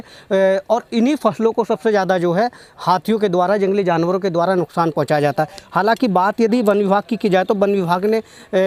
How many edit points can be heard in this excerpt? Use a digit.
0